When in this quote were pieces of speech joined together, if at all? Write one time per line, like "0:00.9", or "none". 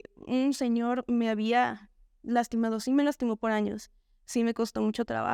none